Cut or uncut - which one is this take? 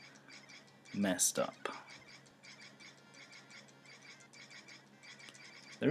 uncut